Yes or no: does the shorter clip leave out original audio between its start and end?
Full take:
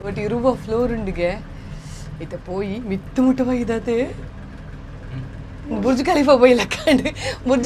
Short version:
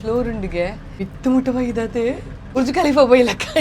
yes